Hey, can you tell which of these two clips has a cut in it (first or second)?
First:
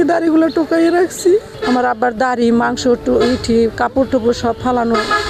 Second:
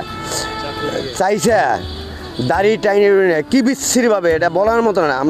first